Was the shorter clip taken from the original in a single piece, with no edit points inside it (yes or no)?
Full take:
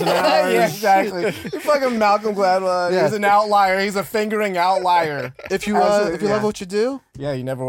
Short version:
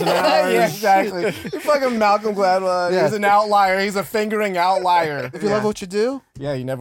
no